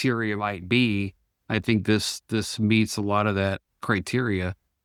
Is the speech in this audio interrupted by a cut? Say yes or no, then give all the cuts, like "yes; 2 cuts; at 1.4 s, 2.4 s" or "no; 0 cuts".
no; 0 cuts